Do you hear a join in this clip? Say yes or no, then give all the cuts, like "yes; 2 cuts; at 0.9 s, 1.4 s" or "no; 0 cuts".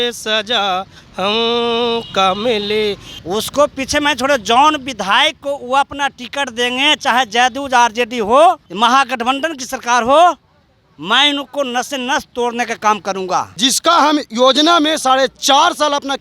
yes; 2 cuts; at 3.1 s, 13.5 s